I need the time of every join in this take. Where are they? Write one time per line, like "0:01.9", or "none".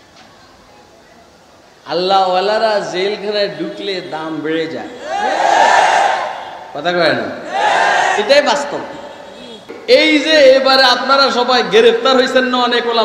0:09.7